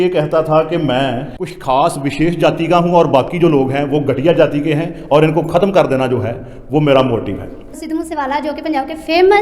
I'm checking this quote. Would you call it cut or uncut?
cut